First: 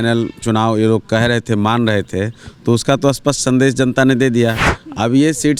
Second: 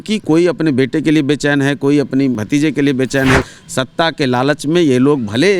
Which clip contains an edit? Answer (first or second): second